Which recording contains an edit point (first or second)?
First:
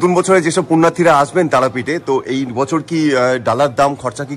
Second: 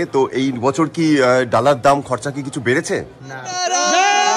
second